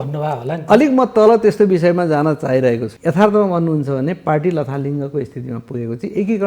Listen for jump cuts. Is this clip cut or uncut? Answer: cut